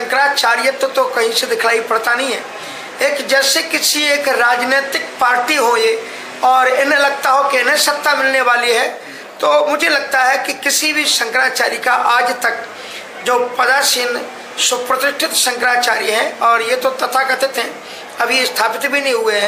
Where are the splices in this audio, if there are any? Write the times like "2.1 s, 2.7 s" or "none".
none